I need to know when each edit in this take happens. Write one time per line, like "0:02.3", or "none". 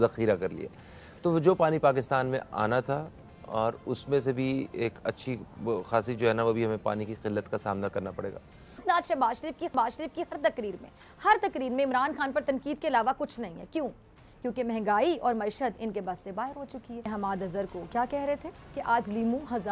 0:08.7
0:17.0